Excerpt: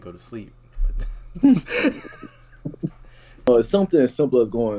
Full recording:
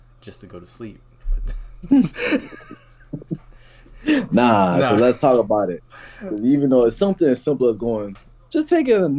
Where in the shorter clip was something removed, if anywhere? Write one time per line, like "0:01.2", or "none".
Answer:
0:03.5